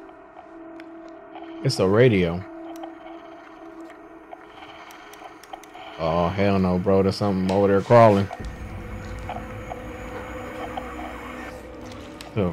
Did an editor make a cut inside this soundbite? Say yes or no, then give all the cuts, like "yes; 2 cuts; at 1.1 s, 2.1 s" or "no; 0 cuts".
no; 0 cuts